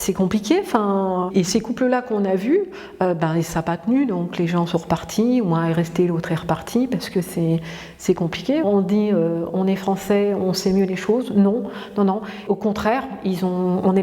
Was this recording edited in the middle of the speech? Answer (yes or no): yes